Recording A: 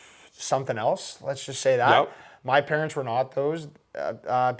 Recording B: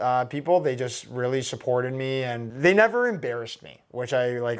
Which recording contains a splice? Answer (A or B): B